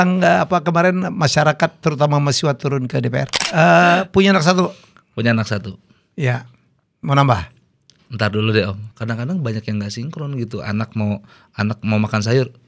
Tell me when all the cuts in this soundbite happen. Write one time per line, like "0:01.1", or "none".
0:03.4
0:08.9